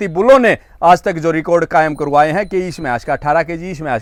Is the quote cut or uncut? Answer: uncut